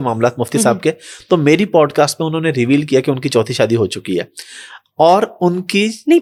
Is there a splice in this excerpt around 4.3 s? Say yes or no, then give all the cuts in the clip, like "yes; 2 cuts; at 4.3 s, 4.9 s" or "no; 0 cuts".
no; 0 cuts